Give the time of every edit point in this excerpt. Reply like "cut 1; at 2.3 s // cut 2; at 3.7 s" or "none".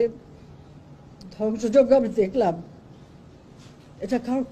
none

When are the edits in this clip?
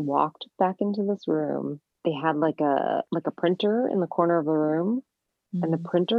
cut 1; at 1.9 s // cut 2; at 3.1 s

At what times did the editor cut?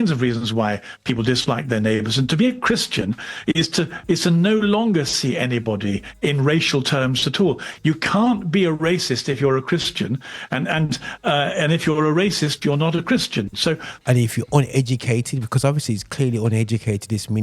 cut 1; at 13.9 s

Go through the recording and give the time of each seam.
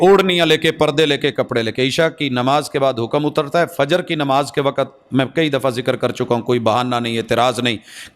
none

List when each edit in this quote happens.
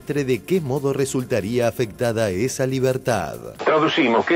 cut 1; at 3.4 s

